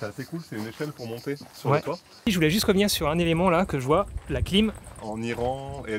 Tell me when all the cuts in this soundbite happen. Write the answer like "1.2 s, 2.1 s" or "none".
2.2 s, 5.0 s